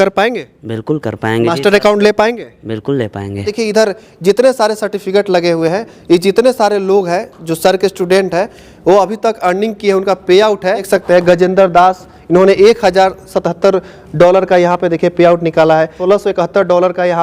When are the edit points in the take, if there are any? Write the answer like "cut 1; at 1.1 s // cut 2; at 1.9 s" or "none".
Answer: cut 1; at 3.5 s // cut 2; at 10.9 s // cut 3; at 16.0 s